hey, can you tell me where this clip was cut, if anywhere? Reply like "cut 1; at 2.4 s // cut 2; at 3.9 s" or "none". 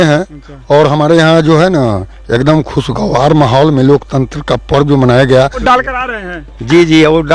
cut 1; at 5.6 s